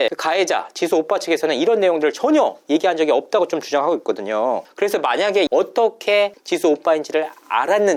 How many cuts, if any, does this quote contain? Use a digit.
0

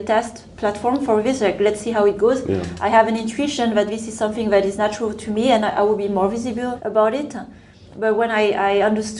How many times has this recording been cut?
2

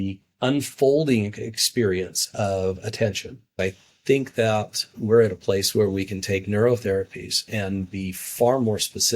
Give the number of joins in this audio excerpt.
1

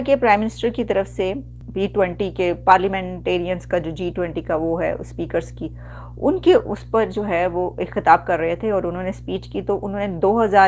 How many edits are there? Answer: 1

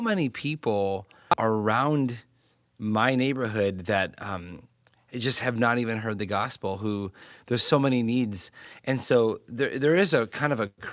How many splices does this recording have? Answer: 1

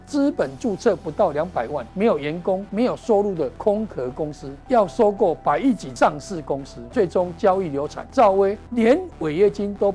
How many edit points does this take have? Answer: 8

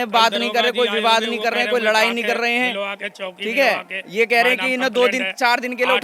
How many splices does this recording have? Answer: 0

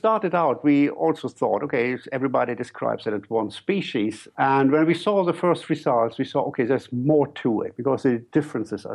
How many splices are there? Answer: 1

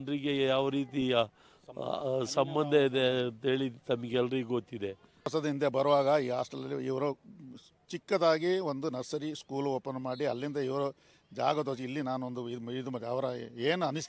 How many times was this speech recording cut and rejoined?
1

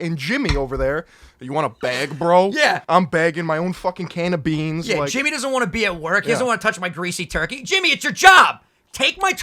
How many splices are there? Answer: 1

